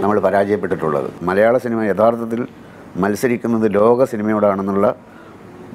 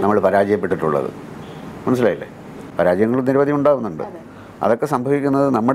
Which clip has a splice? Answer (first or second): first